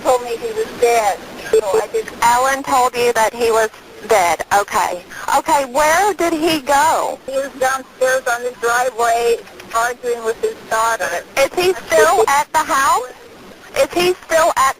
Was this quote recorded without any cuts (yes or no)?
no